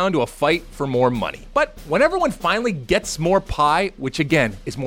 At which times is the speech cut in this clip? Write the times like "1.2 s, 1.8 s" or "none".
1.4 s